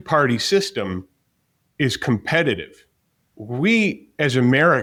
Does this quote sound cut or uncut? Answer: uncut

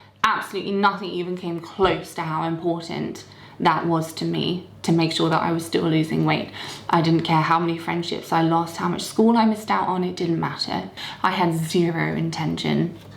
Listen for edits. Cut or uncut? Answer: cut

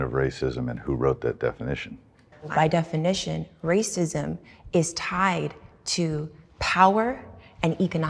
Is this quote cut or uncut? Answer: cut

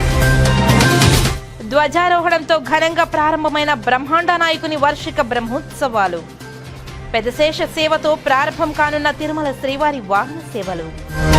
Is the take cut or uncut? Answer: cut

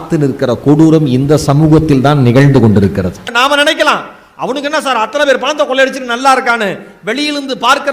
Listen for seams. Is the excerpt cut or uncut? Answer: cut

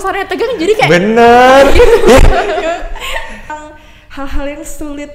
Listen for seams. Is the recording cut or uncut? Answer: cut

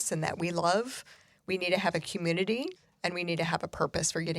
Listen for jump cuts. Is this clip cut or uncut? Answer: cut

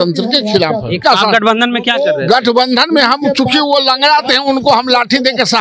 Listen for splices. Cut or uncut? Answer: cut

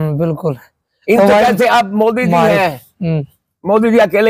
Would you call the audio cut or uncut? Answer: uncut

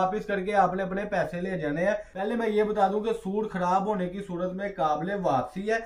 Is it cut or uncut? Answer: cut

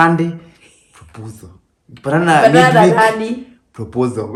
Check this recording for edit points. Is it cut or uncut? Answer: uncut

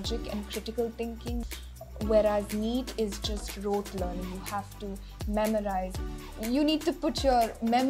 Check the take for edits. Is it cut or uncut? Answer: cut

